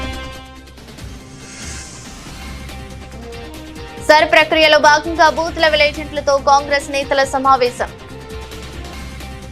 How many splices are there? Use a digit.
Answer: 1